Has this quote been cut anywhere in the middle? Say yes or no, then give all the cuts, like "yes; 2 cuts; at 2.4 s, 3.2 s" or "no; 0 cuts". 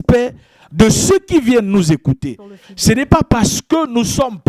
no; 0 cuts